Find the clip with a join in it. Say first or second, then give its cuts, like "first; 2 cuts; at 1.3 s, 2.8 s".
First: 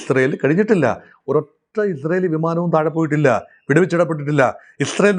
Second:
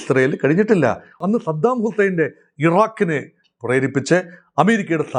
second; 1 cut; at 1.1 s